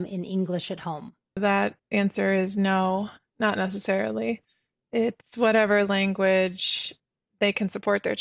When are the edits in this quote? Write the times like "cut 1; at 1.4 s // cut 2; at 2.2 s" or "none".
cut 1; at 1.4 s